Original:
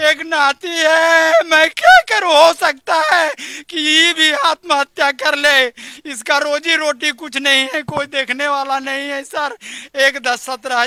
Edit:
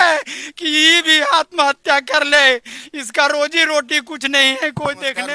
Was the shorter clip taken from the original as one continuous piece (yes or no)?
yes